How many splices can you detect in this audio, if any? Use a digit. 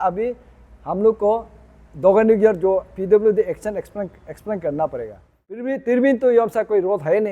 1